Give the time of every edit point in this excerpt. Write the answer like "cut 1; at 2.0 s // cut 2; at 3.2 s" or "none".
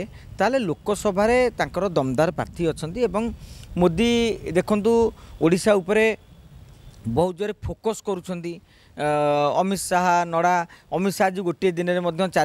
none